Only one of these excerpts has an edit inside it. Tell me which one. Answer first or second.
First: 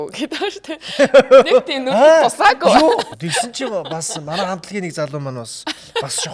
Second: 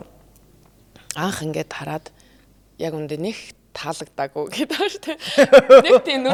first